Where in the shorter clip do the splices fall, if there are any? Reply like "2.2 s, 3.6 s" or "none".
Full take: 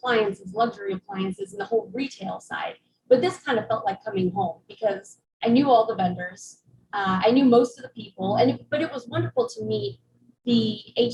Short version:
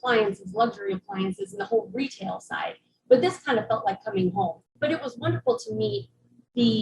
4.7 s